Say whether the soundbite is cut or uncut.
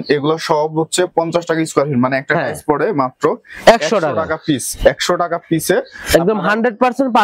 uncut